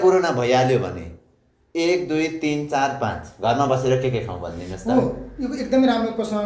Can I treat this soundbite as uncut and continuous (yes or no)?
yes